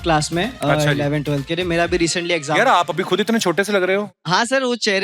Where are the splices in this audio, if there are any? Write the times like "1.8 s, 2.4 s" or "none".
4.1 s